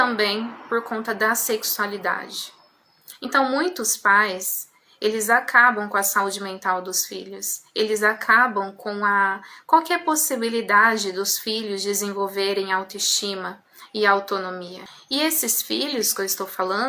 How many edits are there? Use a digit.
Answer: 0